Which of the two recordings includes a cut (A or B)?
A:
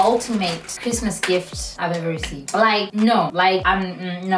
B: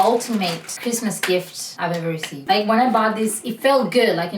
B